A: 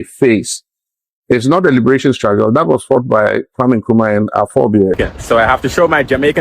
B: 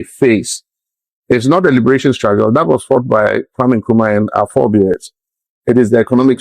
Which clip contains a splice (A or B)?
A